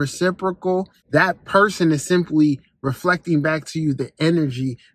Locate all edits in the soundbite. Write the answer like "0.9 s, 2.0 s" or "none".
1.0 s